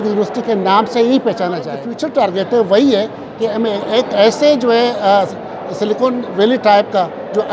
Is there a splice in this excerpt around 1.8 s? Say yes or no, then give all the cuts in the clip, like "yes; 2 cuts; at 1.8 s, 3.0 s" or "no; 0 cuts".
yes; 1 cut; at 1.8 s